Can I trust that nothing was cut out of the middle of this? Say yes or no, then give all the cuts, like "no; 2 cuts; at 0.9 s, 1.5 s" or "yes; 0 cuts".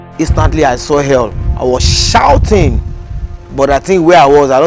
no; 1 cut; at 1.4 s